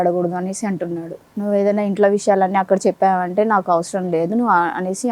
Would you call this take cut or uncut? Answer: cut